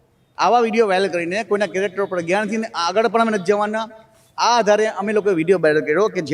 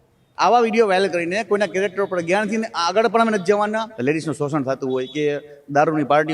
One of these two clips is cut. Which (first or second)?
second